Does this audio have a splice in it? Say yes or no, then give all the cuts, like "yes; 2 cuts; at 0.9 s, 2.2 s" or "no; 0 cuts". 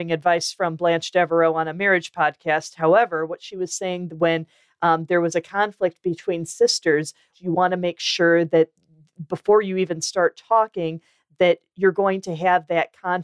yes; 1 cut; at 7.3 s